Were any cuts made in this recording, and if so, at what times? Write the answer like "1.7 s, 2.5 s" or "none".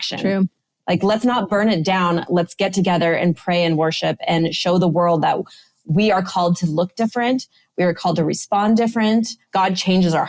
9.4 s